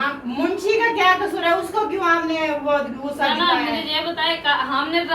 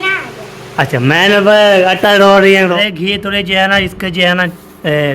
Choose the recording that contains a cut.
second; 1 cut; at 2.7 s

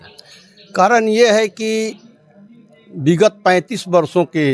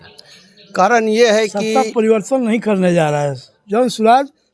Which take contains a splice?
second; 1 cut; at 1.6 s

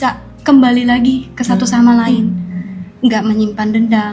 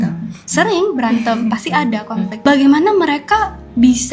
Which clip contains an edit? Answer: second; 1 cut; at 2.4 s

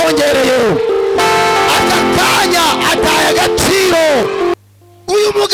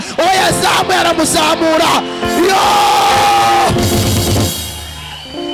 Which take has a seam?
first; 1 cut; at 4.5 s

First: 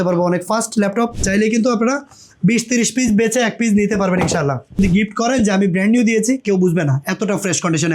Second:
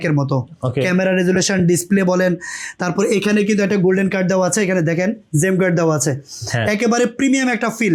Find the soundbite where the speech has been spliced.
first; 2 cuts; at 1.2 s, 4.8 s

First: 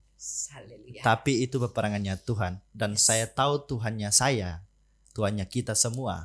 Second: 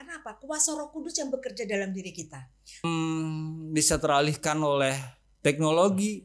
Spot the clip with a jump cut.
second; 1 cut; at 2.8 s

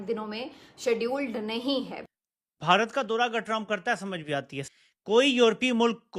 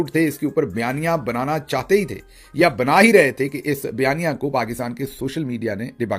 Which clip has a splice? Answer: first; 2 cuts; at 2.0 s, 4.6 s

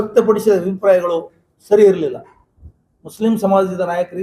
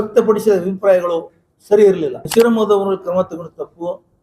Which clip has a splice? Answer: second; 1 cut; at 2.2 s

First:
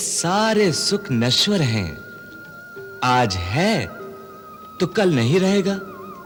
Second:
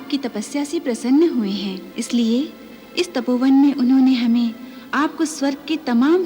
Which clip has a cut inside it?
second; 1 cut; at 1.8 s

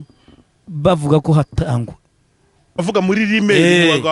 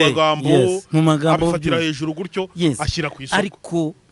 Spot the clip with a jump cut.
first; 1 cut; at 2.8 s

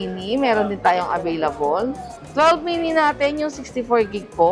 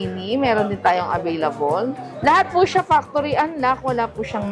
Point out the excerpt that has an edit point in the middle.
second; 1 cut; at 2.1 s

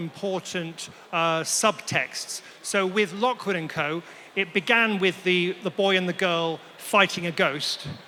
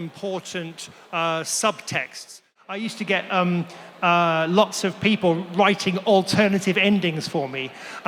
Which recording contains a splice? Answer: second; 1 cut; at 2.6 s

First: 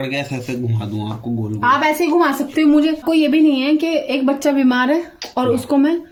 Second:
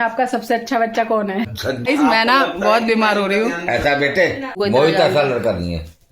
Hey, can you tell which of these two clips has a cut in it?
second; 2 cuts; at 1.9 s, 4.5 s

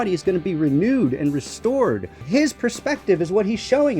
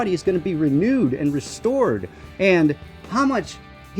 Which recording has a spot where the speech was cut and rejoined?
first; 1 cut; at 2.2 s

